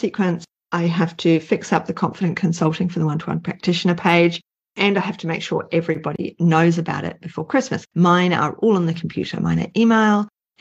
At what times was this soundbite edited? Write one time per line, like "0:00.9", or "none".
0:07.8